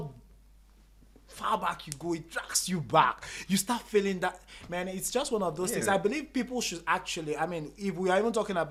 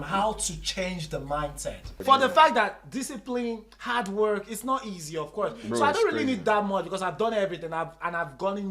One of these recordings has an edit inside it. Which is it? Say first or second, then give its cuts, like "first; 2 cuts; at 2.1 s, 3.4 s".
second; 1 cut; at 2.0 s